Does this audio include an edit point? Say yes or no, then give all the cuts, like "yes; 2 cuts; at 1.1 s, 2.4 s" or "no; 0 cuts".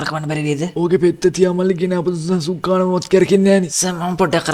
no; 0 cuts